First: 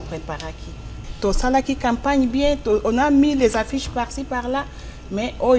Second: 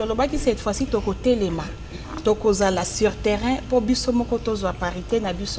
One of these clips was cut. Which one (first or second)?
first